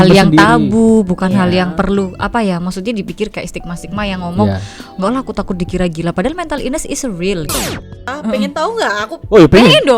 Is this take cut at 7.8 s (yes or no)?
yes